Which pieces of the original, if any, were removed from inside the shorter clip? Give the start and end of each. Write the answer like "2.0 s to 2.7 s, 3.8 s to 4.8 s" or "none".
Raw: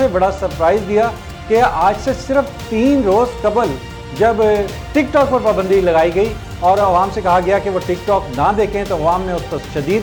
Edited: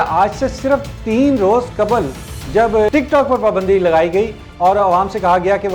4.5 s to 4.9 s